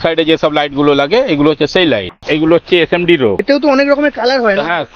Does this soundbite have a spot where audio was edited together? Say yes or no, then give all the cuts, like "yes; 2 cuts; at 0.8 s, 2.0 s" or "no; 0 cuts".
yes; 2 cuts; at 2.1 s, 3.4 s